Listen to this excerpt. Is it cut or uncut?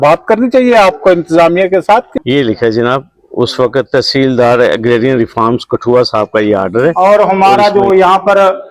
cut